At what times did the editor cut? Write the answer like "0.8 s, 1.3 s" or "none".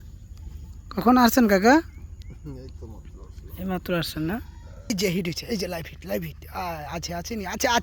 4.9 s

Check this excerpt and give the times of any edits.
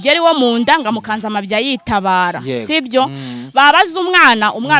none

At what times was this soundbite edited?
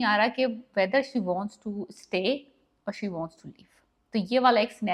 none

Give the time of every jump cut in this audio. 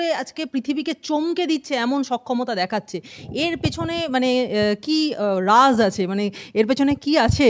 none

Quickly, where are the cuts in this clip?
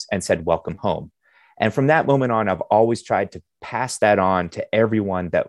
none

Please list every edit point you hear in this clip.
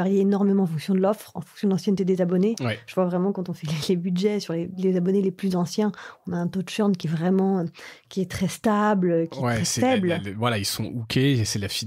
none

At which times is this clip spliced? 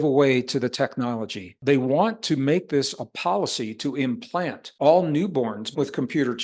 1.6 s, 4.6 s, 5.7 s

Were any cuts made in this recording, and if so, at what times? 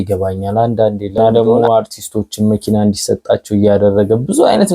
1.2 s

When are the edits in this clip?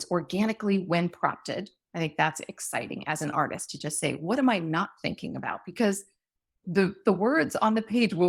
none

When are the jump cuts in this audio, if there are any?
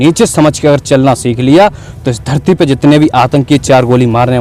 none

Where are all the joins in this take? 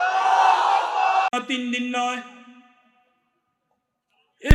1.3 s

